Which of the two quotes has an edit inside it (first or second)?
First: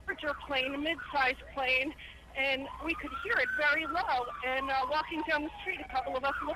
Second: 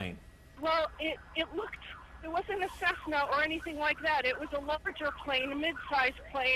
first